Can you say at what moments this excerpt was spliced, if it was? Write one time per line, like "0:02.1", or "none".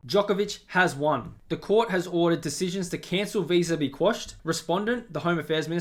none